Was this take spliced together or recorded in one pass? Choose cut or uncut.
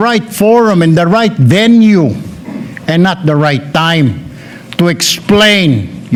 uncut